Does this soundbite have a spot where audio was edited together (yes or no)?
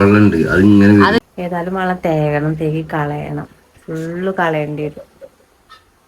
yes